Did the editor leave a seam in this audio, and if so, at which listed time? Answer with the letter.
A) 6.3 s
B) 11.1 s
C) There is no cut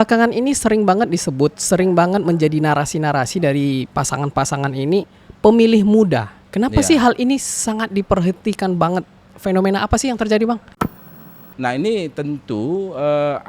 B